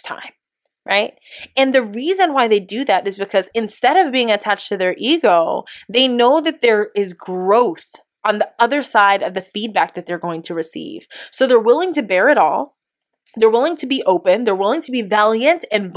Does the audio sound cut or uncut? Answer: uncut